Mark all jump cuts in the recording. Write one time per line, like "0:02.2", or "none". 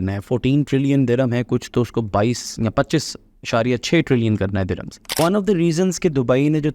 0:05.1